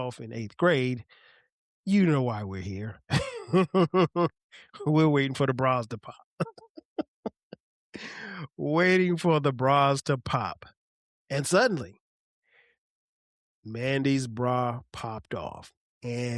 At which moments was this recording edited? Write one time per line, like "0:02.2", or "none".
none